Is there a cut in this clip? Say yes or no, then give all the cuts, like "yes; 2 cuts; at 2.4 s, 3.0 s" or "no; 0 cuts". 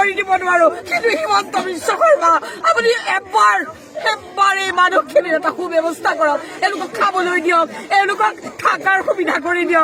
no; 0 cuts